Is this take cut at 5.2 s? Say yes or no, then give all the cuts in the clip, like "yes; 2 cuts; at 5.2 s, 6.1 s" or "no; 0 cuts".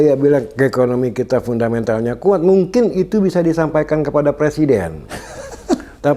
no; 0 cuts